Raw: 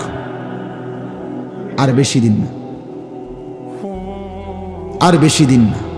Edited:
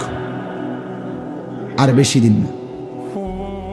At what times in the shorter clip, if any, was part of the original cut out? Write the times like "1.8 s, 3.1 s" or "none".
2.5 s